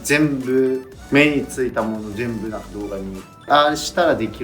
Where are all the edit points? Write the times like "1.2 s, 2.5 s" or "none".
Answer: 0.9 s, 3.5 s